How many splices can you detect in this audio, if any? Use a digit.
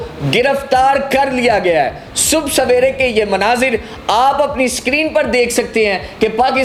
0